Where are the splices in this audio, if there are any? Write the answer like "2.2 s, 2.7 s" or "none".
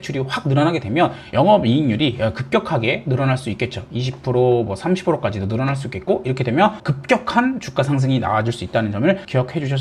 6.8 s